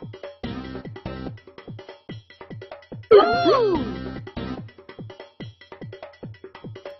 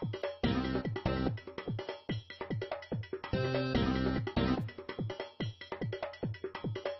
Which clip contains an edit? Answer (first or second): first